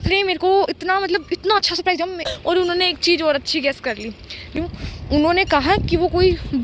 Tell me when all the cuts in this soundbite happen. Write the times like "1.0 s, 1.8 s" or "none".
2.3 s, 4.5 s